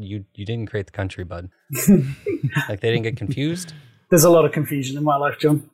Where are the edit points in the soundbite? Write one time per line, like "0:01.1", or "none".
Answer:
0:01.6